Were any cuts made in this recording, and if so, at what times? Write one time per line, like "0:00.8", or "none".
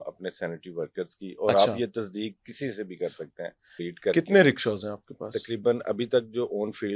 0:03.7